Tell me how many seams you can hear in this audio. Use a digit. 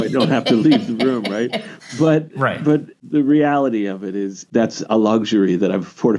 2